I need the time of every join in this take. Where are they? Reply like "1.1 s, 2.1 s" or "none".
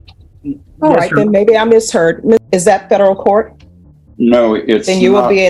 2.5 s